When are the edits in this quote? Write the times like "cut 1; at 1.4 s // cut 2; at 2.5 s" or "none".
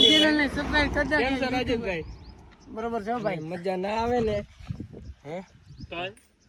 none